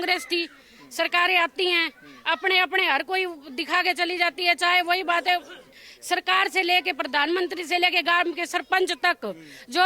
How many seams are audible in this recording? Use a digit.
0